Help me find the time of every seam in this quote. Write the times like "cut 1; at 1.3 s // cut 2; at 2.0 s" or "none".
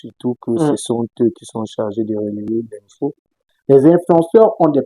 cut 1; at 3.5 s